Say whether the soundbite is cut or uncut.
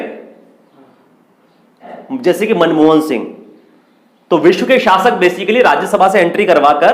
cut